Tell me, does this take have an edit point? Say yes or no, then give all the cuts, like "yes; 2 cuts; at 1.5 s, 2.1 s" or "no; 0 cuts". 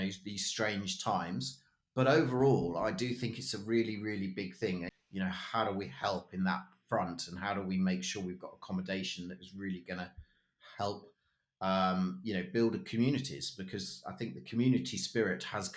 yes; 1 cut; at 4.9 s